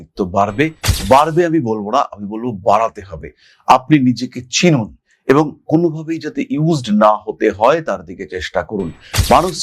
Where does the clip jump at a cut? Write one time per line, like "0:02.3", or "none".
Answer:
none